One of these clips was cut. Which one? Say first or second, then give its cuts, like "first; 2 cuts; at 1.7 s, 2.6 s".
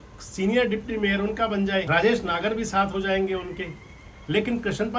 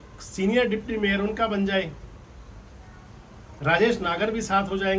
first; 1 cut; at 1.9 s